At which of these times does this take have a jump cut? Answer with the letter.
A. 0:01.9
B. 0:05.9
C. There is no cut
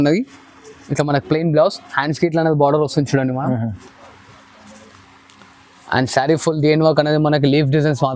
C